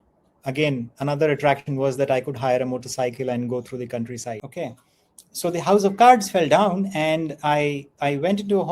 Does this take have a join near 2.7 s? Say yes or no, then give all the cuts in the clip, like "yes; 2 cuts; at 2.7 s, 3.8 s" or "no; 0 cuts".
no; 1 cut; at 4.4 s